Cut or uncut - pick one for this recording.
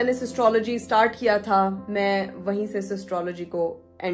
uncut